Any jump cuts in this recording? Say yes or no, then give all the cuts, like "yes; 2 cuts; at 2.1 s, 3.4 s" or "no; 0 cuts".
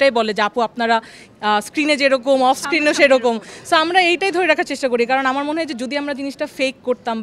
no; 0 cuts